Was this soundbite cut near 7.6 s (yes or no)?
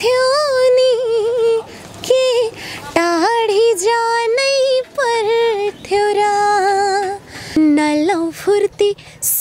yes